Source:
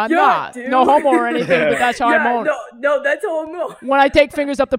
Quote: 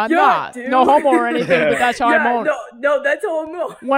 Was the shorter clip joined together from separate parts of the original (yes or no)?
no